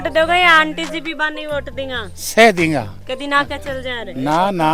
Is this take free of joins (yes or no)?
yes